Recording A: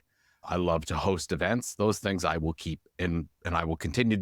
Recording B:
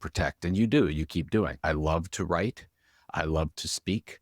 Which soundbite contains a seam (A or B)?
B